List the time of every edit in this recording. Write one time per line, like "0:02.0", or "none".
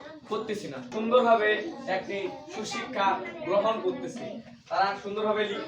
0:00.9

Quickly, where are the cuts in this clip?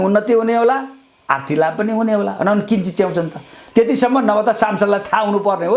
none

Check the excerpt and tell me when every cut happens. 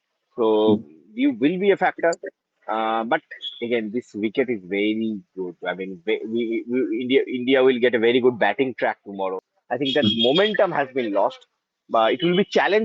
0:09.5

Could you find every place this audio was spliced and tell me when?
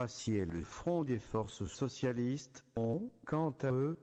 none

